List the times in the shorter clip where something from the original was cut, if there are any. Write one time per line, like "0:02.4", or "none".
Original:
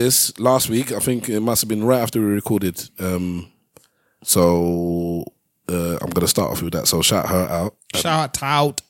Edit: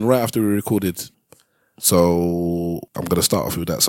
0:01.1
0:03.0